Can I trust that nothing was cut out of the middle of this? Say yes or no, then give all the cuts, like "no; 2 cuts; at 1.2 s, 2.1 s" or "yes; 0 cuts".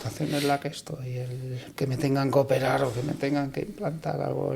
yes; 0 cuts